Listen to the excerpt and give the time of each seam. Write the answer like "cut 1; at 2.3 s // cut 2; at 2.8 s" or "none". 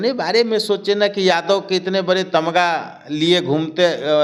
none